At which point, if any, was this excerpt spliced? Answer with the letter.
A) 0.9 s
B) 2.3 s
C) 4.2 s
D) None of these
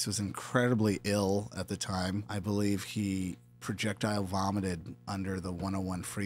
B